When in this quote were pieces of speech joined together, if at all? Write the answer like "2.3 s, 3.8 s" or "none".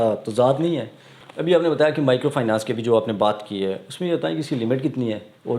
1.3 s